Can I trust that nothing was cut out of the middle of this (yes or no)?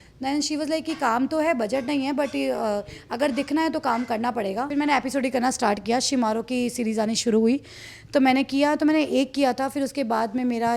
no